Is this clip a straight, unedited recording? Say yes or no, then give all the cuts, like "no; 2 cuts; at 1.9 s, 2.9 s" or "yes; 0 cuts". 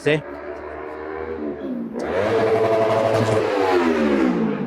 yes; 0 cuts